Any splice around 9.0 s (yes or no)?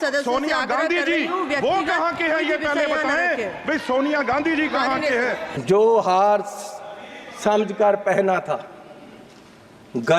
no